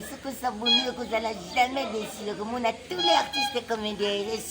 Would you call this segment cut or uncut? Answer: cut